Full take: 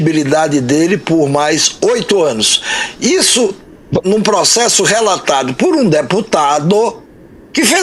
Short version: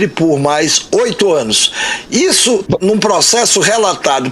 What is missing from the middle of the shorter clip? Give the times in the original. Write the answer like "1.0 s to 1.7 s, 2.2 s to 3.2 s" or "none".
3.5 s to 3.9 s